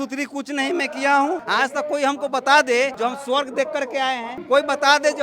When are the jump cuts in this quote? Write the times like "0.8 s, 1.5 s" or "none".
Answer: 1.4 s, 2.9 s, 4.3 s